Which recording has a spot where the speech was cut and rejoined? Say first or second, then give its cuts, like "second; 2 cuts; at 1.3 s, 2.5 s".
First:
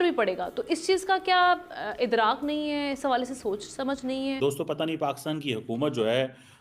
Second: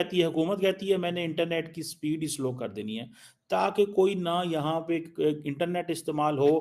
first; 1 cut; at 4.4 s